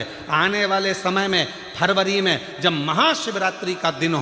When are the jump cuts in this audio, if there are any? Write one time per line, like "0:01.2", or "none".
none